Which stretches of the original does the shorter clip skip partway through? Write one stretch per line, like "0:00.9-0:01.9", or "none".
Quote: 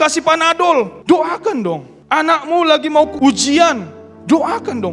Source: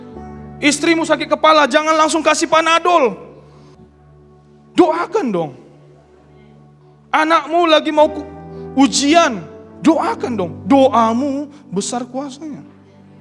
0:03.2-0:04.6
0:05.6-0:06.9
0:08.2-0:08.7